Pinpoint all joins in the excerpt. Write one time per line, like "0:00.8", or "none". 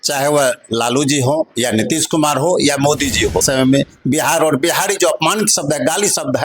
0:03.4